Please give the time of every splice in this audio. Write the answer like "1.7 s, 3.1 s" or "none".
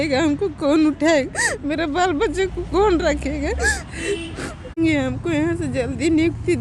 4.8 s

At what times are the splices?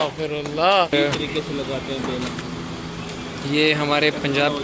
none

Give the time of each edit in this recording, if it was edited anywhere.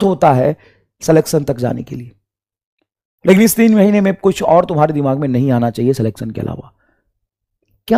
none

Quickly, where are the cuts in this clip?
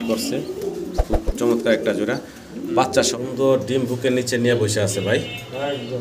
3.1 s

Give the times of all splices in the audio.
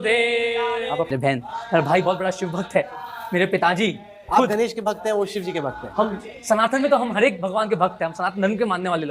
1.1 s

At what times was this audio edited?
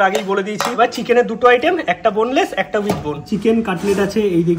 0.8 s, 3.2 s

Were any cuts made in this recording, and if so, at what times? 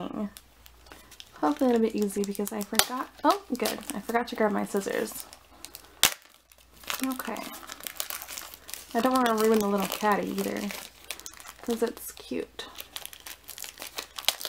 none

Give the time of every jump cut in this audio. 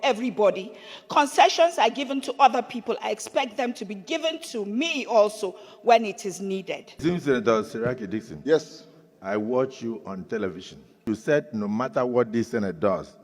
6.8 s, 11.0 s

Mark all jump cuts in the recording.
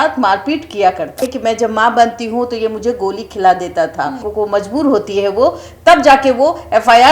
1.2 s, 4.2 s

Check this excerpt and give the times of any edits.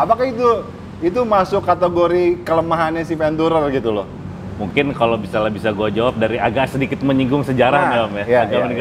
none

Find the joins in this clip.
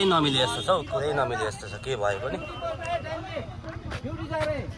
none

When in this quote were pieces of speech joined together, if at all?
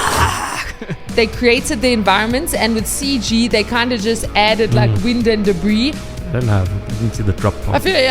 1.1 s, 6.0 s

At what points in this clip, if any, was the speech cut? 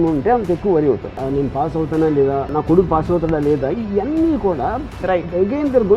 1.2 s, 2.5 s

